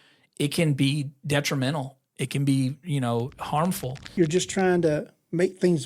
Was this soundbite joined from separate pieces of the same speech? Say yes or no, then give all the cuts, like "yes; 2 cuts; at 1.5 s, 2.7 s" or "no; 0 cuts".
yes; 1 cut; at 4.1 s